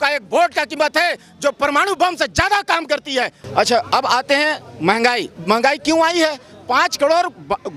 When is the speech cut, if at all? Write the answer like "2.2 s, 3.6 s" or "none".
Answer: 3.4 s, 5.3 s